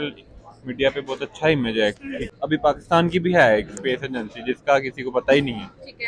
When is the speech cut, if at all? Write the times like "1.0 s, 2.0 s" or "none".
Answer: 2.3 s